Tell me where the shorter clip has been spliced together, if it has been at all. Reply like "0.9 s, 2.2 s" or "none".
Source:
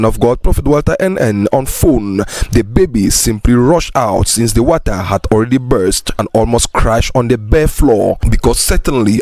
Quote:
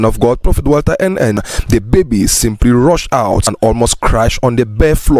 1.4 s, 3.5 s